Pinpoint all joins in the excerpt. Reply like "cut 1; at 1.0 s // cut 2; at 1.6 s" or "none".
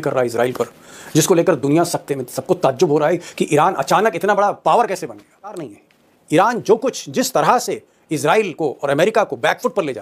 cut 1; at 5.7 s

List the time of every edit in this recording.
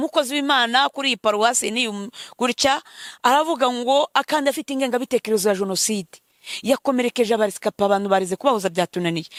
none

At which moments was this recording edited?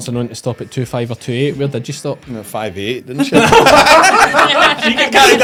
none

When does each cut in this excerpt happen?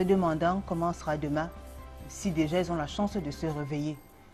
none

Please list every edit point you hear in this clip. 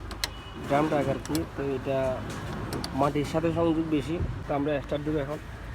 cut 1; at 4.4 s

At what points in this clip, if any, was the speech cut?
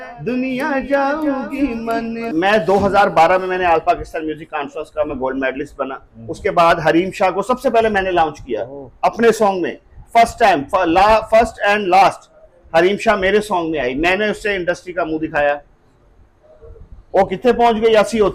cut 1; at 2.3 s

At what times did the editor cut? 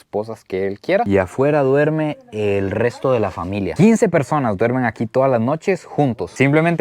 none

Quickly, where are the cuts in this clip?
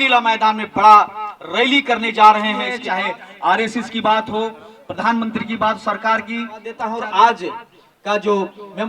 cut 1; at 2.8 s // cut 2; at 6.8 s

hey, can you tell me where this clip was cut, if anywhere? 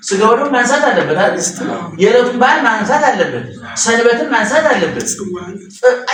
none

